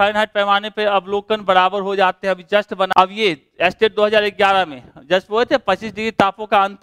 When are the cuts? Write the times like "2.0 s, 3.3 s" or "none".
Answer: 2.9 s